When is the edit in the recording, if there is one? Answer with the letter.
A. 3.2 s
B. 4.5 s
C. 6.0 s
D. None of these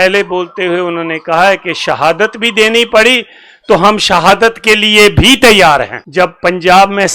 C